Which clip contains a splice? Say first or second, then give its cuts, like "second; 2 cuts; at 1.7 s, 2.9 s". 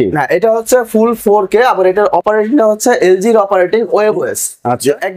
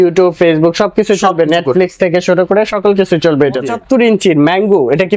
second; 1 cut; at 3.7 s